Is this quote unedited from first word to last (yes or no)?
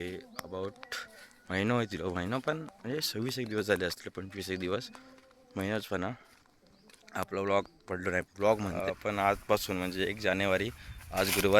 no